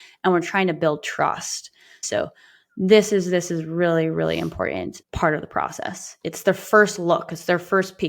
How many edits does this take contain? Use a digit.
1